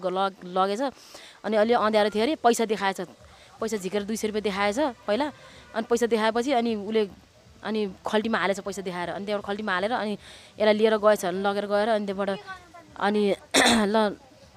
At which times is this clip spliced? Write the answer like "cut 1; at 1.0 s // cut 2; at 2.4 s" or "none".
none